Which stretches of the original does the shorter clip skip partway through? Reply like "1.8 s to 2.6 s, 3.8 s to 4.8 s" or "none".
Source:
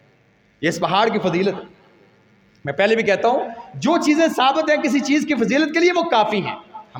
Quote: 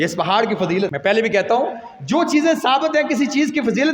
1.6 s to 2.7 s